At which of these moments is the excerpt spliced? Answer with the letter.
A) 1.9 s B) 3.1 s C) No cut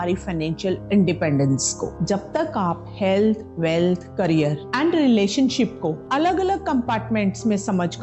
A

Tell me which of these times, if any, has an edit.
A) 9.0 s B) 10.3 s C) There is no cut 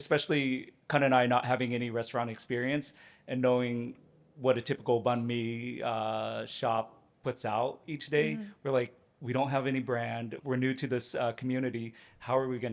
B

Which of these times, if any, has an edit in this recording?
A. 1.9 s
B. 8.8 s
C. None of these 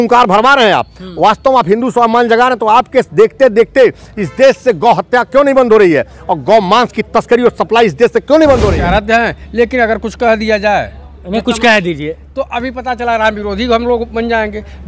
B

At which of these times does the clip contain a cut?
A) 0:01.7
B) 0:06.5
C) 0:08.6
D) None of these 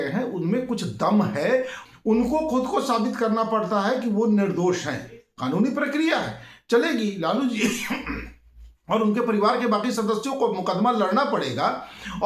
A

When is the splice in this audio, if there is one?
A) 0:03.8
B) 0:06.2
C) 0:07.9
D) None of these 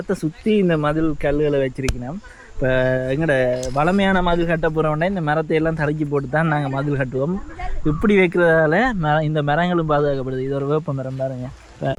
D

